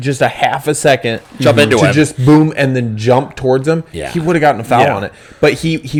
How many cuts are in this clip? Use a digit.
0